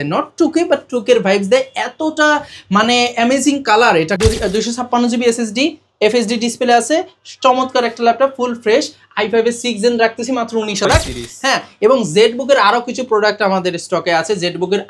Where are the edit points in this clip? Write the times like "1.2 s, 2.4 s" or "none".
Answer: 4.1 s, 10.9 s